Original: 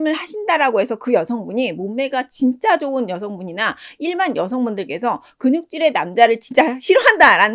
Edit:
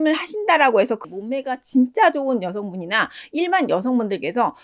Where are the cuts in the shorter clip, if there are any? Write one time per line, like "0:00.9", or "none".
0:01.0